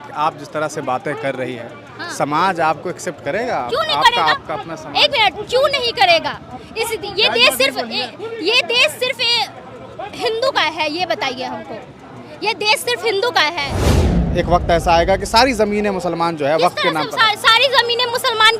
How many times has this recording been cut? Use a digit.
1